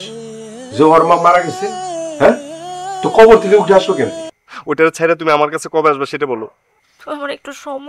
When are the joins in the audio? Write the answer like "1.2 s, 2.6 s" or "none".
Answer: 4.3 s